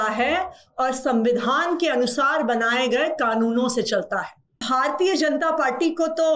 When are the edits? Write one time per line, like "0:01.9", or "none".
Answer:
0:04.6